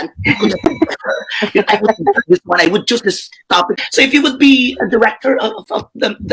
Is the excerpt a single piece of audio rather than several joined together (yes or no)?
no